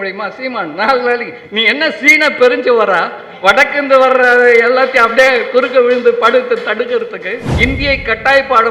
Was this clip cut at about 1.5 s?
no; 1 cut; at 7.4 s

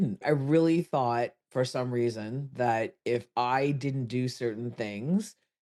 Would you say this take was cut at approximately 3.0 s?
no; 0 cuts

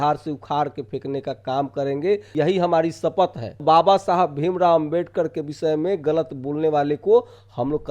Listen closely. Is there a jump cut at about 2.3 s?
yes; 2 cuts; at 2.3 s, 3.6 s

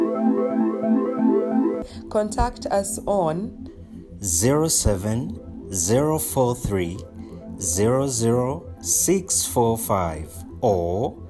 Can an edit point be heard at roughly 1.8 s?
yes; 1 cut; at 1.8 s

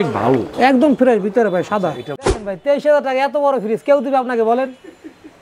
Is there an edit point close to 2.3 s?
yes; 1 cut; at 2.3 s

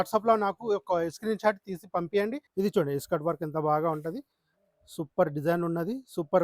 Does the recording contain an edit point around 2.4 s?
yes; 1 cut; at 2.4 s

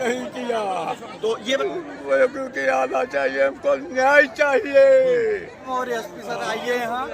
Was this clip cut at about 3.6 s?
no; 2 cuts; at 1.6 s, 5.7 s

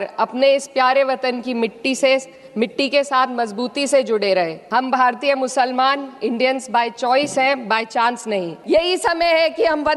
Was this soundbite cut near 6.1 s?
no; 2 cuts; at 4.6 s, 8.5 s

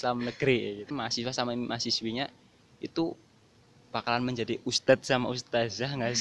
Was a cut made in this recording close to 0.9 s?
yes; 1 cut; at 0.9 s

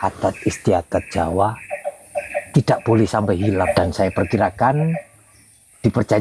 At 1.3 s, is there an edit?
no; 1 cut; at 3.7 s

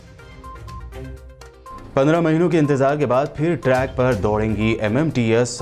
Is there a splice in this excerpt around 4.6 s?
no; 1 cut; at 1.3 s

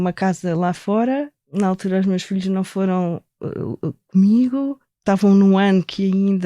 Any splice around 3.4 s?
no; 2 cuts; at 1.5 s, 4.9 s

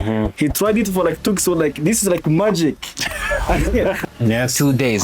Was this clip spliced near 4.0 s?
yes; 1 cut; at 4.0 s

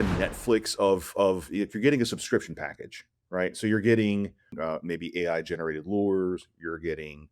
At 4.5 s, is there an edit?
yes; 1 cut; at 4.5 s

